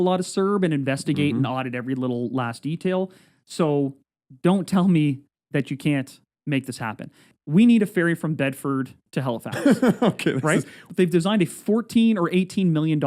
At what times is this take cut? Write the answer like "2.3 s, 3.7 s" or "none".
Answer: 7.3 s, 9.0 s, 10.8 s